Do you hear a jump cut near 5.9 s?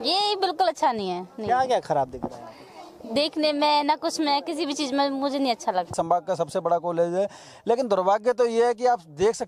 yes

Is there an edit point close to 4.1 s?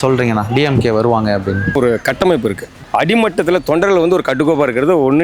no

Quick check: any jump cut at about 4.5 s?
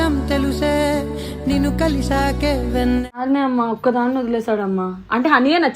no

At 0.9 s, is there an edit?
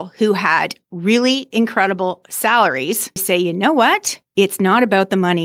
no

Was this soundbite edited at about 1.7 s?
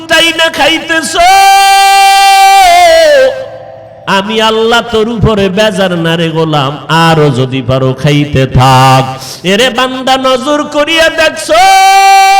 no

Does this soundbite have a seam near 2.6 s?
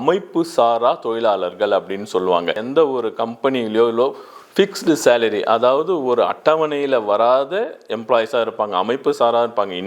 yes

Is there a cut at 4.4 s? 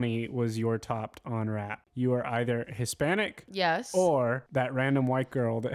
yes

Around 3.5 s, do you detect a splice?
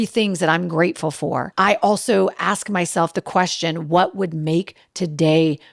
no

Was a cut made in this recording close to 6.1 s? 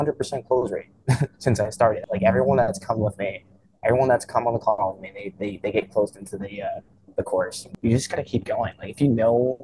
no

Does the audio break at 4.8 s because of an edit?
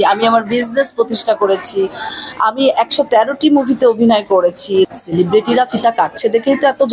yes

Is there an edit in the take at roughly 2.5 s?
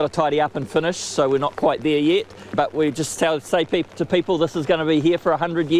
yes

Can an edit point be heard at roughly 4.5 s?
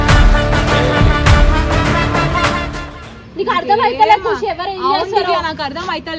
no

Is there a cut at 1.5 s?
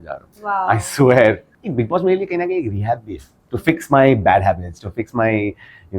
yes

